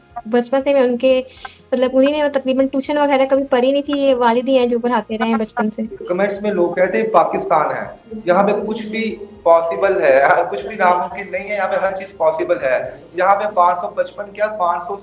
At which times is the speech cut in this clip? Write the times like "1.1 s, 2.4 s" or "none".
6.0 s